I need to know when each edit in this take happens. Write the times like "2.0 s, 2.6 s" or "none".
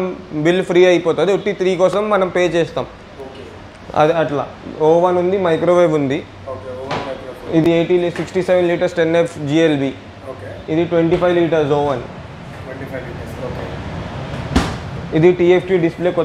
none